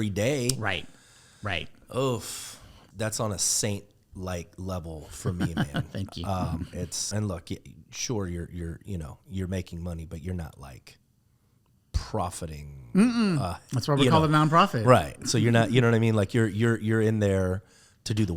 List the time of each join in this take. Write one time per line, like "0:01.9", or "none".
0:02.8
0:07.0